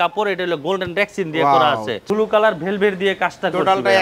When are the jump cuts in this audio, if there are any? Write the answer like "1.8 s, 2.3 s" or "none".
2.0 s

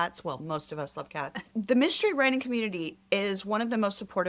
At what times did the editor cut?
1.4 s

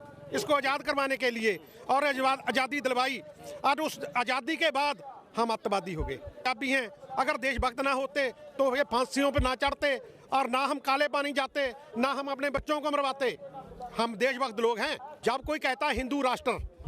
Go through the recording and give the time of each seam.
6.5 s, 15.1 s

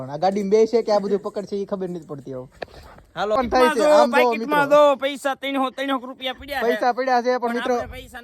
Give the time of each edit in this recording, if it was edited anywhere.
3.4 s, 6.9 s

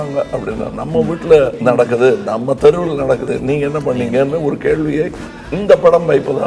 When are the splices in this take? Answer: 1.6 s, 3.2 s

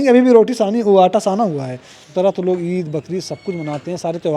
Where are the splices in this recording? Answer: 2.0 s

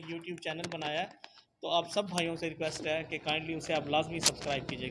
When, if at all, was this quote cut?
none

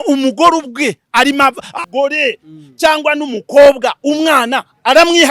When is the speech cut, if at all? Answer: 1.9 s

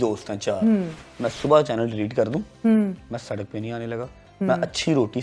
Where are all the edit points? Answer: 1.0 s

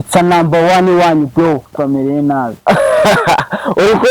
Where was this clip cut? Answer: 1.7 s

